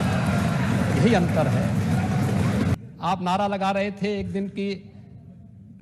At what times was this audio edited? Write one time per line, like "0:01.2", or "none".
0:02.7